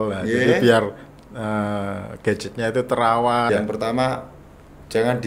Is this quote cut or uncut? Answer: cut